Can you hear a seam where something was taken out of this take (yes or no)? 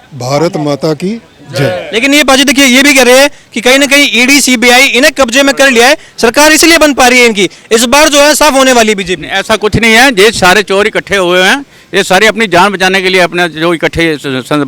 no